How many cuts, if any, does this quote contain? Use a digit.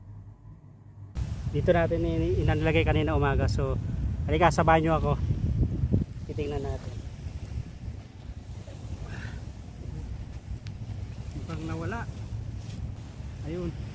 2